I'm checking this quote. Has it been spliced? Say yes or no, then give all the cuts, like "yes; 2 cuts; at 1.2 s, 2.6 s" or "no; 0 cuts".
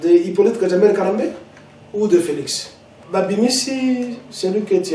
yes; 1 cut; at 3.0 s